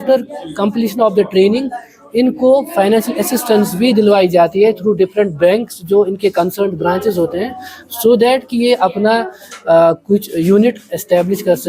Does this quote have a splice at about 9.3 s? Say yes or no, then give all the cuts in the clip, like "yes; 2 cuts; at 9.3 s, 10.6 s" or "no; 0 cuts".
no; 0 cuts